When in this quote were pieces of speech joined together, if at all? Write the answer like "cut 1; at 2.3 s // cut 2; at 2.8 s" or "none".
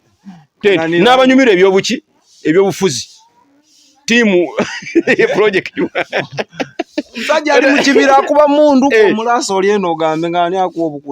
none